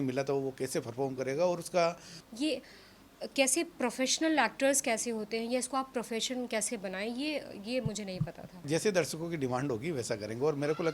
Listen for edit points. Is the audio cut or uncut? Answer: cut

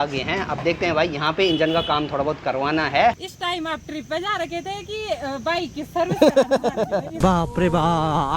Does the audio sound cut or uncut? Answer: cut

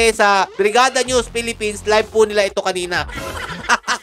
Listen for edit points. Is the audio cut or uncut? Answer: cut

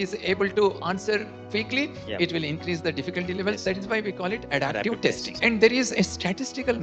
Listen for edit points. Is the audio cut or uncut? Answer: cut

